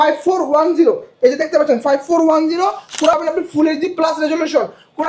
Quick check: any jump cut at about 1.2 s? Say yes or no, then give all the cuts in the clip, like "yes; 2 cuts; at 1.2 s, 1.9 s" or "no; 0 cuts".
no; 1 cut; at 3.1 s